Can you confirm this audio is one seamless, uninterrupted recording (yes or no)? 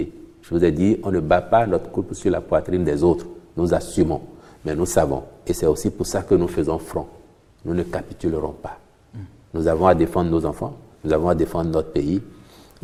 yes